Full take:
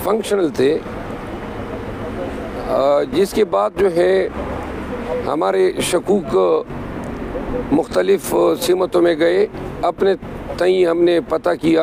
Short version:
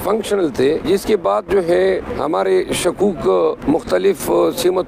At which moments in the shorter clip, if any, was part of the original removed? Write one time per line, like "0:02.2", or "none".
0:00.8
0:02.1
0:03.6